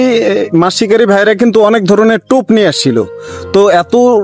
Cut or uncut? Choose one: uncut